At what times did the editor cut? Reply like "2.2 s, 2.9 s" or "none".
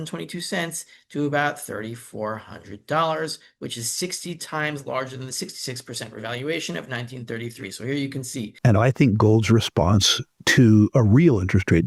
8.5 s